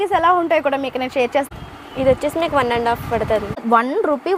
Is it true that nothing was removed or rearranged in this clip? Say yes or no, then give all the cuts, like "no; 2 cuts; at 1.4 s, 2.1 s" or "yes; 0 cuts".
no; 2 cuts; at 1.5 s, 3.6 s